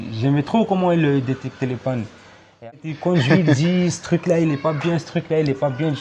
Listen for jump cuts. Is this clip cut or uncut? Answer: cut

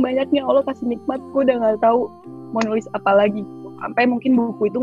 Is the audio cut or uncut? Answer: uncut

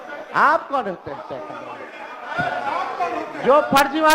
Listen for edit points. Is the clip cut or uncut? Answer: uncut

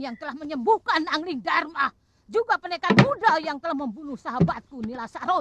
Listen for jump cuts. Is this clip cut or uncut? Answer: uncut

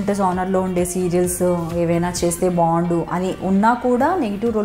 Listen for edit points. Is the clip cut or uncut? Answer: uncut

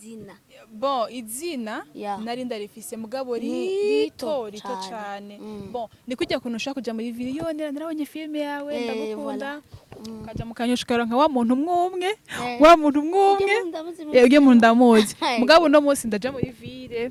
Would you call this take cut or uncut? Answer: uncut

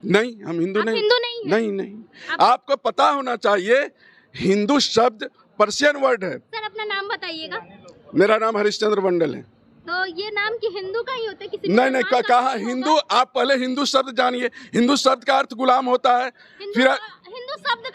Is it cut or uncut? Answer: uncut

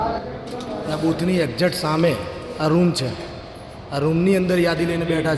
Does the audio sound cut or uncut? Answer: uncut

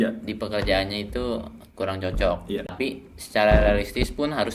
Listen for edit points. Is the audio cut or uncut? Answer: cut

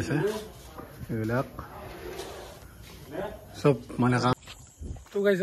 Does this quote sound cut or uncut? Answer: cut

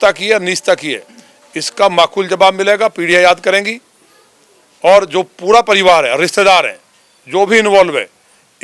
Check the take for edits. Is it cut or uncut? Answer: uncut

